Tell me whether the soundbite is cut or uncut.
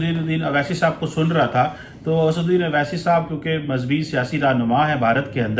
uncut